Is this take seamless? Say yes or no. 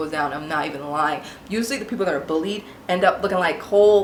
yes